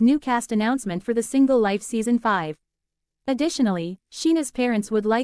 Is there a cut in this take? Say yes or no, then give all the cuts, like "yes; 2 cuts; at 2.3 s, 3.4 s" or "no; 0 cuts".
yes; 1 cut; at 3.1 s